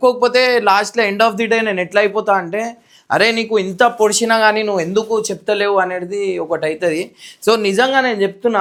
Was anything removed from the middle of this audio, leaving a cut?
no; 0 cuts

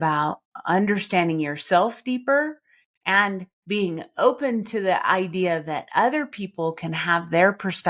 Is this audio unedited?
yes; 0 cuts

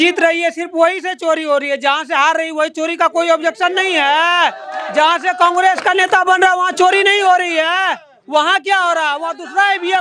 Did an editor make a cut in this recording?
no; 0 cuts

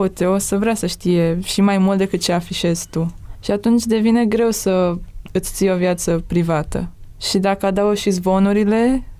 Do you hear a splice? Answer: no; 0 cuts

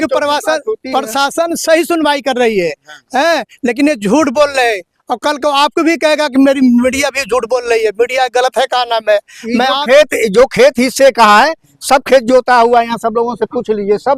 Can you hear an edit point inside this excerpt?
no; 0 cuts

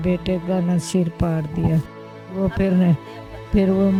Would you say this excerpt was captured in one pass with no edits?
yes; 0 cuts

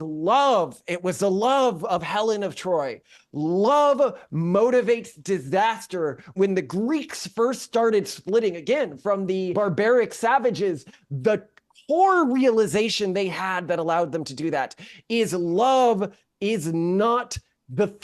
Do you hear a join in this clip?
yes; 2 cuts; at 6.3 s, 9.5 s

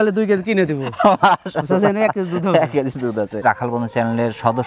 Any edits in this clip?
yes; 1 cut; at 3.4 s

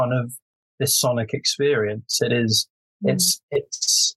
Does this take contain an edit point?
no; 0 cuts

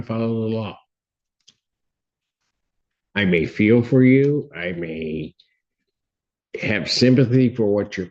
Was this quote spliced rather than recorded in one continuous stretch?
no; 0 cuts

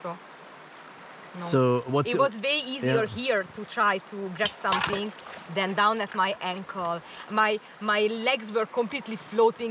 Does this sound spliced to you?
no; 0 cuts

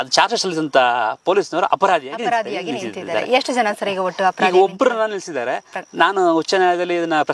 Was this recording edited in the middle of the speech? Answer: no; 0 cuts

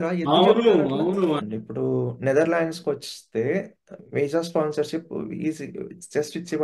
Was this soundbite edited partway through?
yes; 1 cut; at 1.4 s

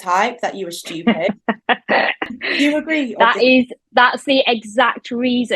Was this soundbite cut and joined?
yes; 1 cut; at 2.3 s

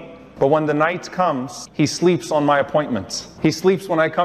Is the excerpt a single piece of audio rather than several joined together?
no; 1 cut; at 1.6 s

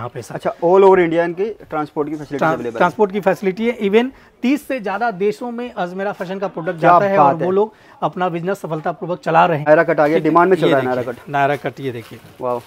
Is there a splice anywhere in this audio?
yes; 1 cut; at 9.6 s

